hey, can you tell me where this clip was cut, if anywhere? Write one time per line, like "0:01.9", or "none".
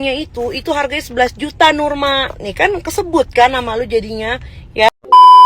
0:04.5